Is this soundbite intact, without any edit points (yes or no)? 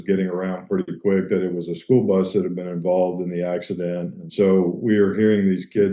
no